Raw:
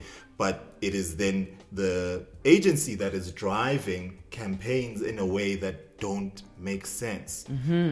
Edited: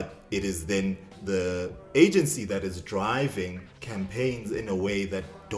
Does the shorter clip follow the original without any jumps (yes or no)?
yes